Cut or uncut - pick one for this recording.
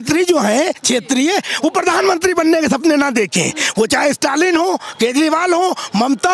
uncut